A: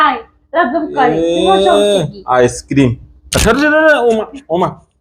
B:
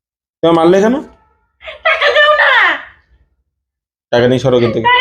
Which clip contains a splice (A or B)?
A